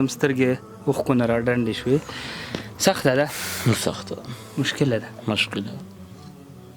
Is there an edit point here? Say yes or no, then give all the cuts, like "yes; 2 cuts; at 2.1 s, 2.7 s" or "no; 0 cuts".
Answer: no; 0 cuts